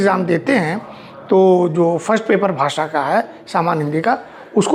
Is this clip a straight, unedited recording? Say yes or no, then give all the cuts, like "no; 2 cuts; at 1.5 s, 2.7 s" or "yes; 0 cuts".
yes; 0 cuts